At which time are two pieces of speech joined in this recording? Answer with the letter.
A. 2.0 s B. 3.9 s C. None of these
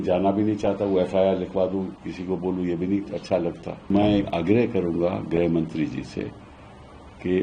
B